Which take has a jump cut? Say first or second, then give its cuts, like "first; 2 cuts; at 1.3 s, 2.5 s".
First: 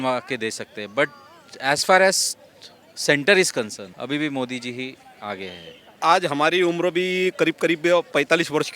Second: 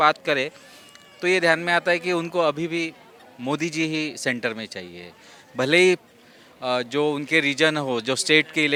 first; 2 cuts; at 3.9 s, 6.0 s